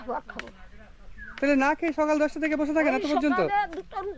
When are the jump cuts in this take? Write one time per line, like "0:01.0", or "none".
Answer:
none